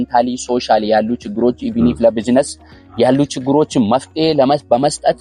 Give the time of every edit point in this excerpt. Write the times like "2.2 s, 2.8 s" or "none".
none